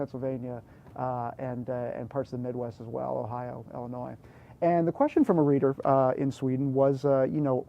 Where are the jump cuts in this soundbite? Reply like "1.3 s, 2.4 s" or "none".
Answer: 2.2 s